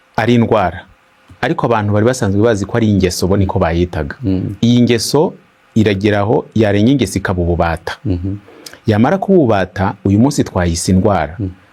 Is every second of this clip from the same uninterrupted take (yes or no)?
yes